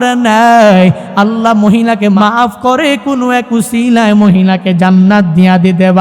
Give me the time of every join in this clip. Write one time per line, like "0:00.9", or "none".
0:02.1